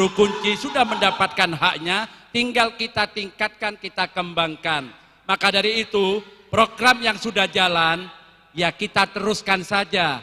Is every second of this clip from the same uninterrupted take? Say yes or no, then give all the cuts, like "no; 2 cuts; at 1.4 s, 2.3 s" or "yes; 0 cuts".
yes; 0 cuts